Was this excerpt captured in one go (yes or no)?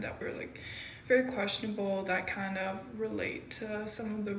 yes